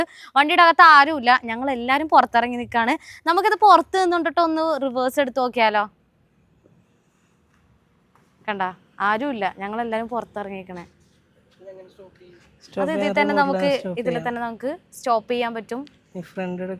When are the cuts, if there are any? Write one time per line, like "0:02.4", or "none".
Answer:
none